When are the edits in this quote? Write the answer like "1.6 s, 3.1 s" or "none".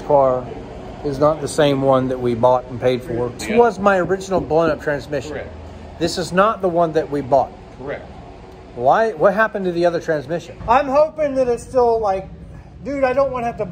3.4 s, 10.5 s